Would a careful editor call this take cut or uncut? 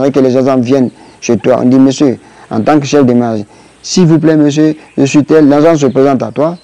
uncut